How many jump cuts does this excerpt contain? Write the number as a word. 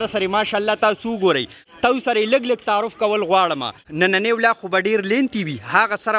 two